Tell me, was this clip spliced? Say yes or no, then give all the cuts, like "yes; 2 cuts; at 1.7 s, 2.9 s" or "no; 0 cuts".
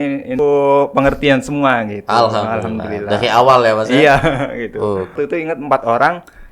yes; 1 cut; at 5.1 s